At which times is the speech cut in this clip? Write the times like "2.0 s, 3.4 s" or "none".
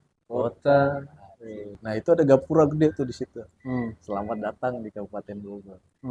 1.9 s